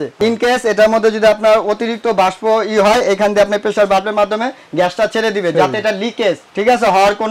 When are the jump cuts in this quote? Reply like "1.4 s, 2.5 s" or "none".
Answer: none